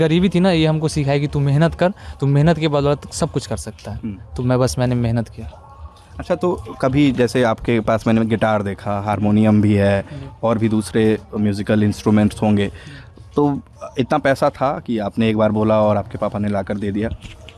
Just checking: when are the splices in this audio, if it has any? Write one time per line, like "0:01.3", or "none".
none